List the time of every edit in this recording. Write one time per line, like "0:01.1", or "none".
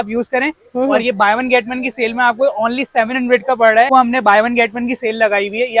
0:03.9